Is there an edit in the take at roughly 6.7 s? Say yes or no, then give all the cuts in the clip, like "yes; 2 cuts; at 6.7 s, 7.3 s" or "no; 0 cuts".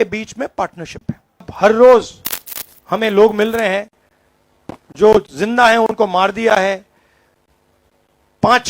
no; 1 cut; at 1.5 s